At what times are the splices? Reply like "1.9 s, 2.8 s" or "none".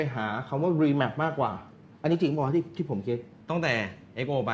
3.3 s